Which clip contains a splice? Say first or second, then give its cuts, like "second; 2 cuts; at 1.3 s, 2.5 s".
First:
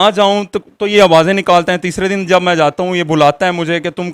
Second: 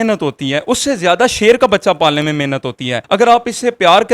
second; 1 cut; at 2.9 s